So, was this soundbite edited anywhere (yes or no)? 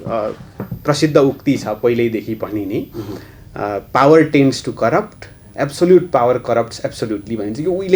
no